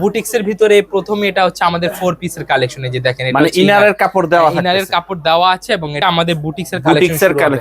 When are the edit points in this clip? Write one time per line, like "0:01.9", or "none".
0:06.0